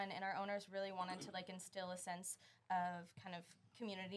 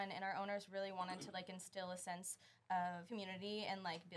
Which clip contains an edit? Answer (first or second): second